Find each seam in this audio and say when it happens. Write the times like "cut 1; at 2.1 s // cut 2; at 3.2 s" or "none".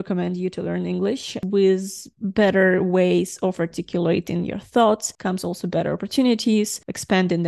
cut 1; at 1.4 s // cut 2; at 5.1 s